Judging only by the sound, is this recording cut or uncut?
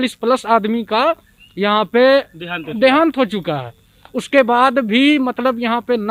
uncut